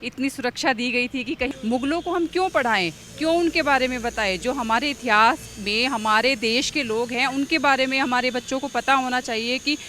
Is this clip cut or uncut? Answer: cut